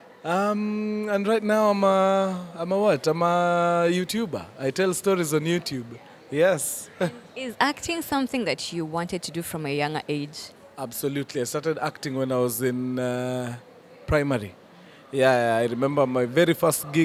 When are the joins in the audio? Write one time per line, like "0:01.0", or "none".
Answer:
none